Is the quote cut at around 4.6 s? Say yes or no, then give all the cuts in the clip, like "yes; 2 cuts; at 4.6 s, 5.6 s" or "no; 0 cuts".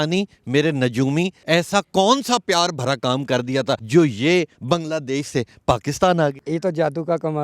yes; 4 cuts; at 1.4 s, 3.8 s, 4.6 s, 6.4 s